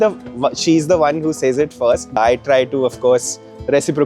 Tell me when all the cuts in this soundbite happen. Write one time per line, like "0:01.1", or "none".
0:02.2